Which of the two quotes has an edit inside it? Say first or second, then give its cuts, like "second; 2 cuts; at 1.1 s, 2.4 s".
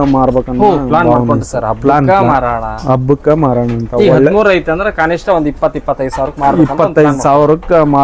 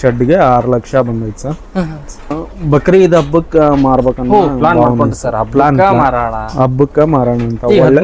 second; 1 cut; at 2.5 s